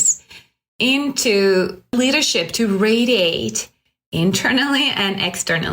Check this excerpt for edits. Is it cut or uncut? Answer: cut